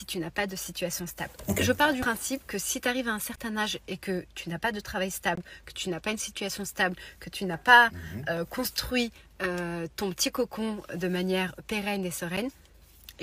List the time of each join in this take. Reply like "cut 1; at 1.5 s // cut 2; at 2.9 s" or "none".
none